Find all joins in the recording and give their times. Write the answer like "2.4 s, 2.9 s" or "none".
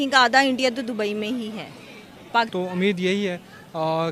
2.5 s